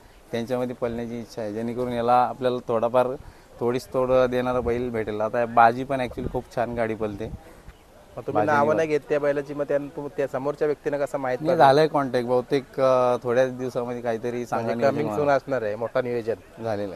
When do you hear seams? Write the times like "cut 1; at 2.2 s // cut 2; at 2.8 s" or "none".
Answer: none